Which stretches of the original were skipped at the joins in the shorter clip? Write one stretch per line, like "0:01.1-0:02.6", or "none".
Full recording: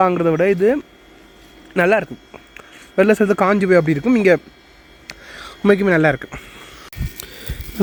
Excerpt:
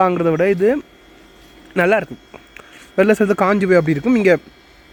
none